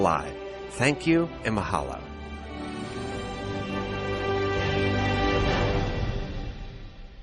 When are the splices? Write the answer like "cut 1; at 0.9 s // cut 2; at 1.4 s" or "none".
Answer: none